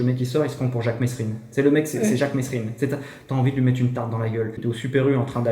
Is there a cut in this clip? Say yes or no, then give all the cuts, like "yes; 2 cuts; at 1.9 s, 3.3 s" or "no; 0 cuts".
yes; 1 cut; at 4.6 s